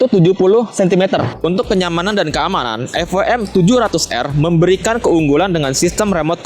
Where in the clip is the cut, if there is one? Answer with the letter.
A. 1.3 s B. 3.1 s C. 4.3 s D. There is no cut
A